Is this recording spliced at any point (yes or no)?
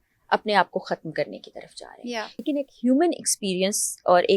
yes